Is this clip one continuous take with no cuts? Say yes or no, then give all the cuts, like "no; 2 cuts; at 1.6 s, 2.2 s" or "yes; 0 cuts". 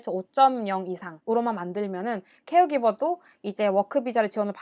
no; 1 cut; at 1.1 s